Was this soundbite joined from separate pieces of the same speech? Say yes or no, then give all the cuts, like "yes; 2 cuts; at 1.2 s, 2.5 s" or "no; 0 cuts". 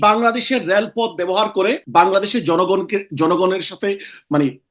yes; 1 cut; at 1.8 s